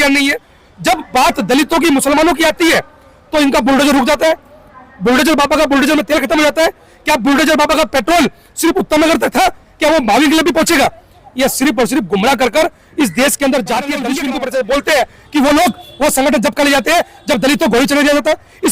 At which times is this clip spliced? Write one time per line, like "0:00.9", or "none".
0:14.1